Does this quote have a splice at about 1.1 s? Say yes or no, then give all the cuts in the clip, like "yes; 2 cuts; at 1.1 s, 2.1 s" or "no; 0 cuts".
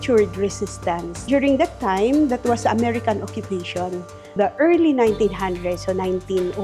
yes; 2 cuts; at 1.1 s, 4.3 s